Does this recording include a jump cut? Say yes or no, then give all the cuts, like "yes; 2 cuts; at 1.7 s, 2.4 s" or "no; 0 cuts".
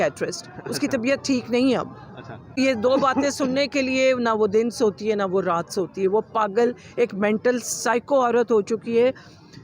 yes; 1 cut; at 2.6 s